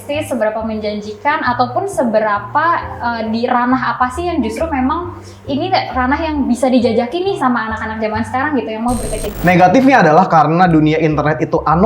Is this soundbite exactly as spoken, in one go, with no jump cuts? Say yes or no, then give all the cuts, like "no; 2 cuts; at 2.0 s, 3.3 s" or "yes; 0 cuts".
no; 1 cut; at 9.2 s